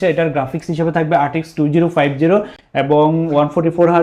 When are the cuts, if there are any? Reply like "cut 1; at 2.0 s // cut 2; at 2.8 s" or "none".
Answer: none

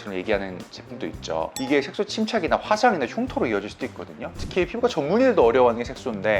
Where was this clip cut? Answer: cut 1; at 1.6 s // cut 2; at 4.3 s

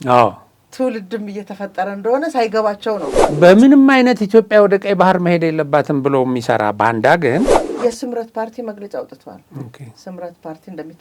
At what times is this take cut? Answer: cut 1; at 3.3 s // cut 2; at 7.6 s

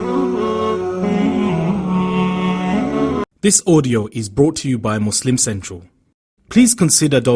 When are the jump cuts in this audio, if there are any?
cut 1; at 3.2 s

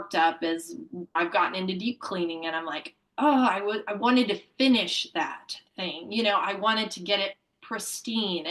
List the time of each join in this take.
cut 1; at 1.2 s

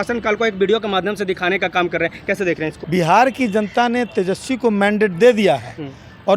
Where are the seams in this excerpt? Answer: cut 1; at 2.8 s

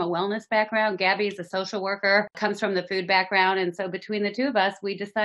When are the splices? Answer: cut 1; at 2.4 s

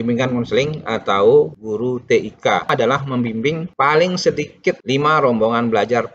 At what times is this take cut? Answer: cut 1; at 2.7 s

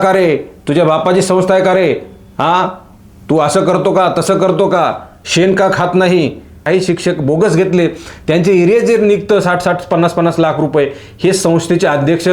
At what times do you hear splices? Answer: cut 1; at 6.6 s

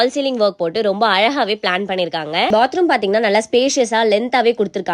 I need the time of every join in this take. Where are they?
cut 1; at 2.5 s

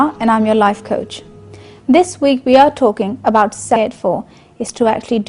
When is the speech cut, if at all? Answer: none

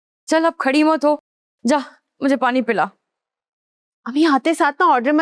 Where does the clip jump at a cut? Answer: none

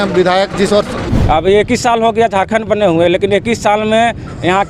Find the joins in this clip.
cut 1; at 1.0 s

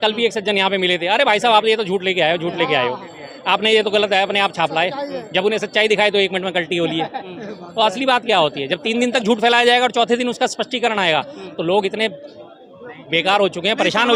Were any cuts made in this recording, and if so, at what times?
none

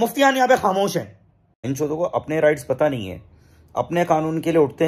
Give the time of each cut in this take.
cut 1; at 1.6 s

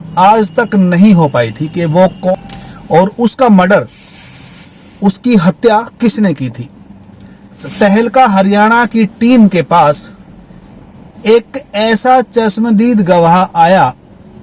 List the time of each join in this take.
cut 1; at 2.3 s // cut 2; at 7.6 s

